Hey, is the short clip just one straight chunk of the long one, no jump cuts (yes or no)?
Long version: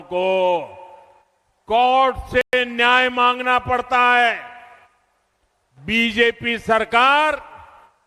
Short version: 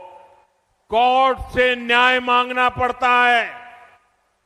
no